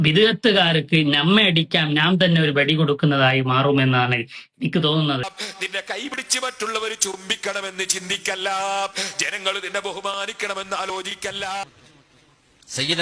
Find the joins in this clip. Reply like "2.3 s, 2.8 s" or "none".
5.4 s, 11.8 s